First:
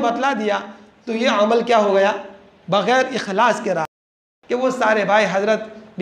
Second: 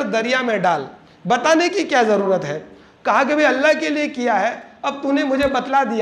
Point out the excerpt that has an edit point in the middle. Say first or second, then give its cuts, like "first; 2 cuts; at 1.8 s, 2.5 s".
first; 1 cut; at 4.0 s